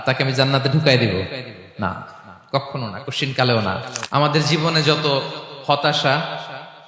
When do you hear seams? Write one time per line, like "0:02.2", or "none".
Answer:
0:04.0